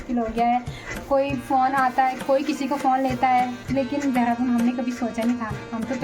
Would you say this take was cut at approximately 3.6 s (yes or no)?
yes